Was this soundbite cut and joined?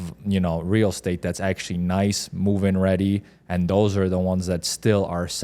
no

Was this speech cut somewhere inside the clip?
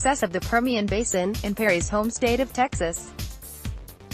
yes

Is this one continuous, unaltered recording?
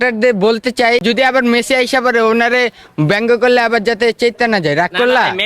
no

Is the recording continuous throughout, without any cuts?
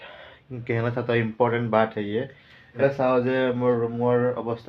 no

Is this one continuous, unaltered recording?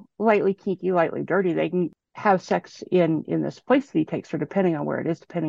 no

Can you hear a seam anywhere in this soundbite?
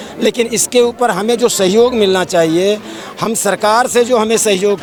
no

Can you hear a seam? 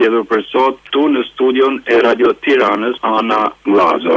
yes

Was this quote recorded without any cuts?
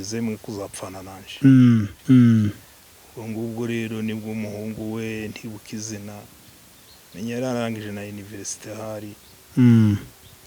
no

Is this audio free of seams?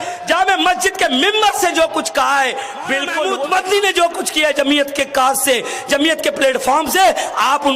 no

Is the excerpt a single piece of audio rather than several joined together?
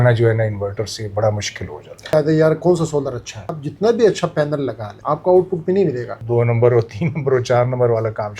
no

